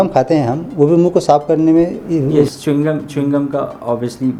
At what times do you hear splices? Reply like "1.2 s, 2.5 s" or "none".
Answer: none